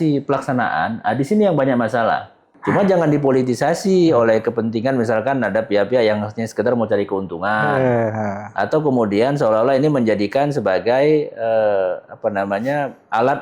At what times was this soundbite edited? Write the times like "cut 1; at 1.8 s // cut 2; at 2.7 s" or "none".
cut 1; at 2.6 s